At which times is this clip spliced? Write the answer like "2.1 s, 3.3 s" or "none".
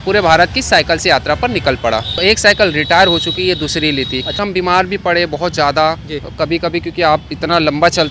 2.1 s, 4.4 s